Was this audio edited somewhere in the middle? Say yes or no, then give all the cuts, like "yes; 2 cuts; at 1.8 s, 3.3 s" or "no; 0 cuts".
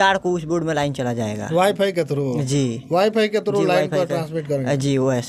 no; 0 cuts